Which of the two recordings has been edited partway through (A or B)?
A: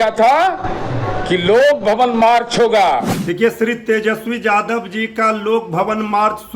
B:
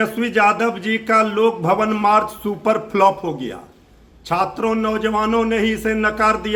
A